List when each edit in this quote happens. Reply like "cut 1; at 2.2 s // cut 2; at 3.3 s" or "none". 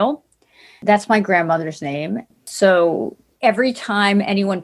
cut 1; at 2.5 s // cut 2; at 3.2 s